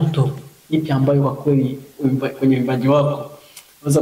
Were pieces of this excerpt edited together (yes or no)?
no